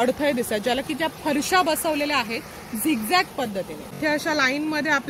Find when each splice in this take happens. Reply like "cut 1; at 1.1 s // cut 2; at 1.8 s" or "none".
cut 1; at 3.8 s